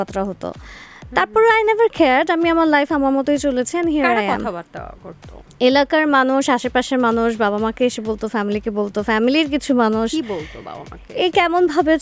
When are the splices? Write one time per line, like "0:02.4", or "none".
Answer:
none